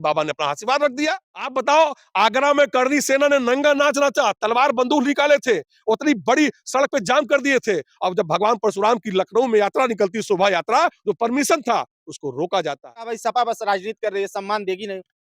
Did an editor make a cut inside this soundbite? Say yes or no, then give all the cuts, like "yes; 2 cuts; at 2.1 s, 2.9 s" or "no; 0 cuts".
yes; 2 cuts; at 1.5 s, 13.1 s